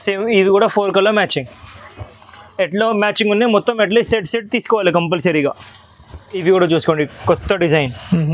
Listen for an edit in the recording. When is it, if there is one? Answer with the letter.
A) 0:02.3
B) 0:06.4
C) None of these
B